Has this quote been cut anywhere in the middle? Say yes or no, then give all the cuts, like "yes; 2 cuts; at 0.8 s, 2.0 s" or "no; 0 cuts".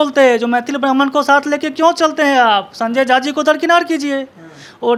no; 0 cuts